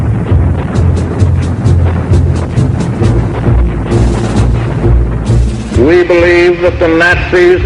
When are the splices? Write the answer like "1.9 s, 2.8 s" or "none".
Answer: none